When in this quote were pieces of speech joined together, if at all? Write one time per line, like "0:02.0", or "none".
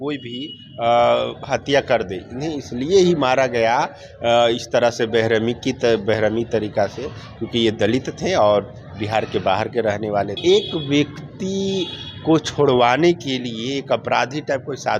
0:10.4